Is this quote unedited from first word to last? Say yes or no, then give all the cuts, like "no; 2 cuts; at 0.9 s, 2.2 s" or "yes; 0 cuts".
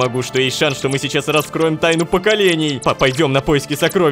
no; 1 cut; at 2.8 s